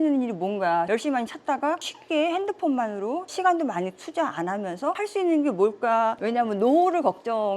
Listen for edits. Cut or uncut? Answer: cut